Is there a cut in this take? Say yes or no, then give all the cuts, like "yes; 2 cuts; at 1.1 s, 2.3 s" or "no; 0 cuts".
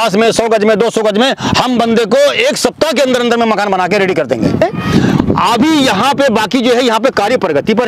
yes; 1 cut; at 4.6 s